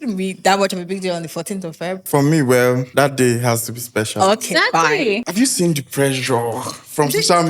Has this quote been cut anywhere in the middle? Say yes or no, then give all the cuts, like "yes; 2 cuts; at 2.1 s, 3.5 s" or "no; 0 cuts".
yes; 3 cuts; at 2.0 s, 2.9 s, 5.2 s